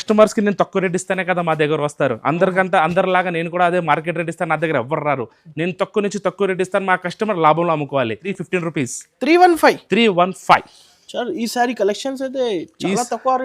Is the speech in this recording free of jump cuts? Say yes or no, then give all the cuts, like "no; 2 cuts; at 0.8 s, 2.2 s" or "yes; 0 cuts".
no; 1 cut; at 8.3 s